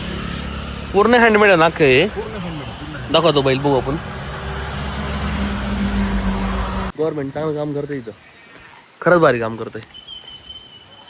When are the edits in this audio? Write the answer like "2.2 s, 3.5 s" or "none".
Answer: 6.9 s